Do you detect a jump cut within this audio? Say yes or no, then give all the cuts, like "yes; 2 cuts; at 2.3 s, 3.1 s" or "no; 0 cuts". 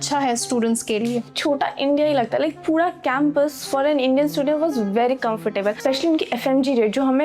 yes; 2 cuts; at 1.3 s, 5.8 s